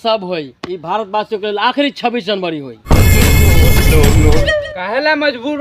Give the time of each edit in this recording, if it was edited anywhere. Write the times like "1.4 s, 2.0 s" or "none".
3.0 s, 4.4 s